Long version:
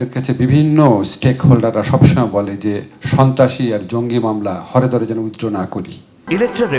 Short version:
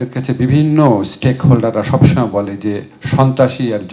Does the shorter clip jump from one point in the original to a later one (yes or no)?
no